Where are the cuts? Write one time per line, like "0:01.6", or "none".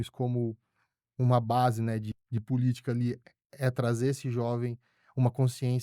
0:02.1

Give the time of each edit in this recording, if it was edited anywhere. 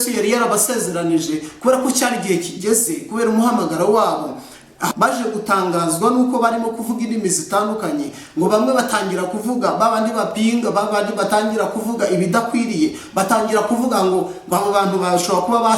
0:04.9

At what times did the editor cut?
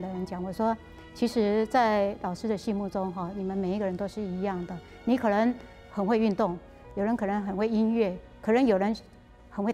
0:05.7

